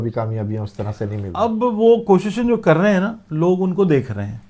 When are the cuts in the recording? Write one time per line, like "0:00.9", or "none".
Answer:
0:01.2